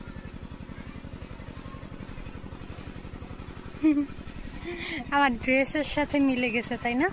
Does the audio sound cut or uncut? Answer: uncut